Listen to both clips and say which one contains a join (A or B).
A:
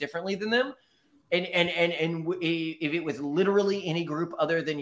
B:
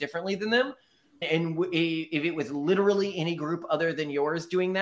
B